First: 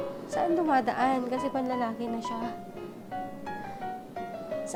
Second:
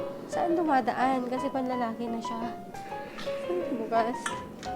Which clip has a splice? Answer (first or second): second